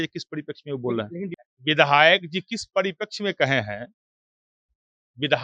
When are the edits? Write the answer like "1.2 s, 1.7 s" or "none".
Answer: 1.4 s

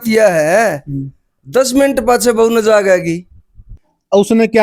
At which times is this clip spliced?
3.7 s

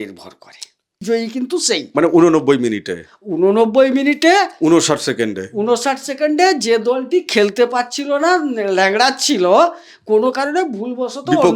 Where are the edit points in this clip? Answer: 1.0 s

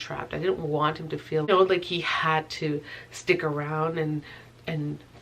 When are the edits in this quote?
1.5 s

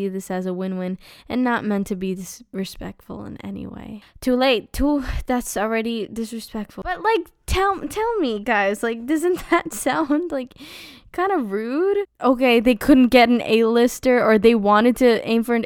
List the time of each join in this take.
none

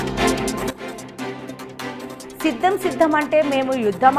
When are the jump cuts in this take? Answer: 2.4 s

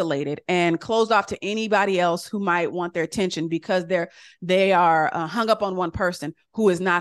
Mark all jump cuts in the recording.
none

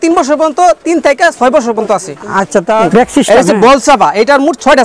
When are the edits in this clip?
2.8 s

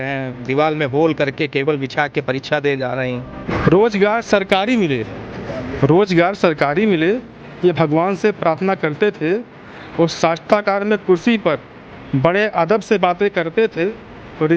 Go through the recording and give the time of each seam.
3.5 s

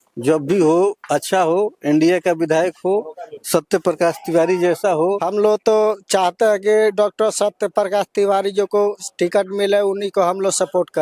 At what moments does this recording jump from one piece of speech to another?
5.2 s

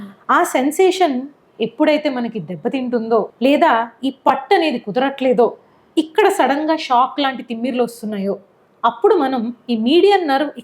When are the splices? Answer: 3.3 s

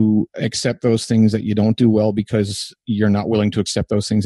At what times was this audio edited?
none

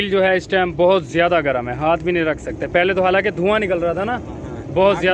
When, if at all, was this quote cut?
none

